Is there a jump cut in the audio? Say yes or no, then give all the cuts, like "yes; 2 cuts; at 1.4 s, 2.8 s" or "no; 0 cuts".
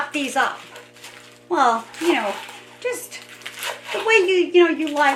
no; 0 cuts